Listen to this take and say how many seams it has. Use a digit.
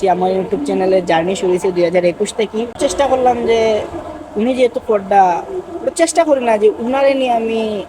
1